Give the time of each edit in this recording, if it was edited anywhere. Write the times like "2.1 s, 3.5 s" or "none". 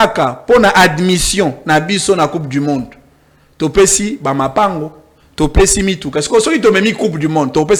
none